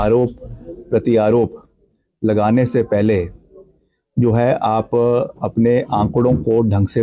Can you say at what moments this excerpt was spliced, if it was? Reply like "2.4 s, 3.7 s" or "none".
none